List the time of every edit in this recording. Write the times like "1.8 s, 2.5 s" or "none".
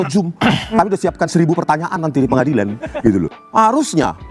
3.4 s